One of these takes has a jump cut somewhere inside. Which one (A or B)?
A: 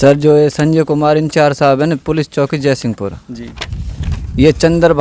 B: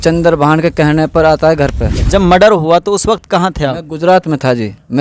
B